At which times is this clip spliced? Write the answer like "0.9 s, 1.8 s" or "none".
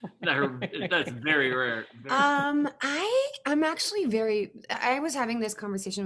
1.9 s